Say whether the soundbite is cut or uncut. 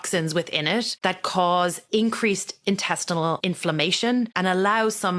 cut